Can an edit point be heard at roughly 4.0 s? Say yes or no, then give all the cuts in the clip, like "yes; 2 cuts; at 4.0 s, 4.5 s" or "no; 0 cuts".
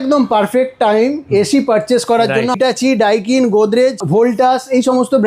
yes; 2 cuts; at 2.6 s, 4.0 s